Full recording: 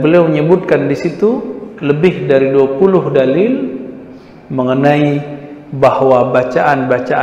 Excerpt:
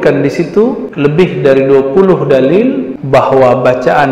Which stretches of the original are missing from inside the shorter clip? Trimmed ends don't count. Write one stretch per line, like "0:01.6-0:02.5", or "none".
0:01.5-0:01.7
0:03.8-0:05.6